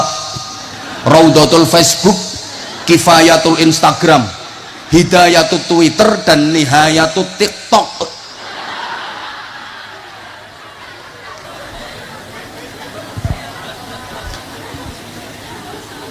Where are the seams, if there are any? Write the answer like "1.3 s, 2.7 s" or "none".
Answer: 11.5 s